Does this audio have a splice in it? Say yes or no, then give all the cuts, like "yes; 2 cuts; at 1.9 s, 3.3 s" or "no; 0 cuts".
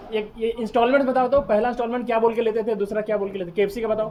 no; 0 cuts